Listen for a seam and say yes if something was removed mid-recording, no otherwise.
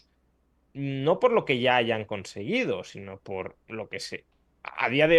no